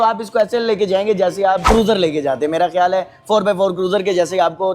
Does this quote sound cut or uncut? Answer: cut